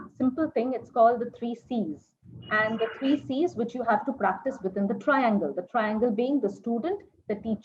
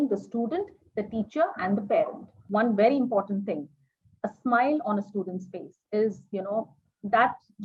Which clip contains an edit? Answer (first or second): second